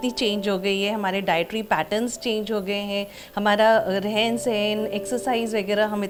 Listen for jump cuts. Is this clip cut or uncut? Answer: uncut